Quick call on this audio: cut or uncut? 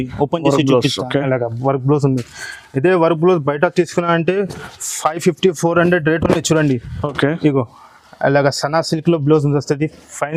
uncut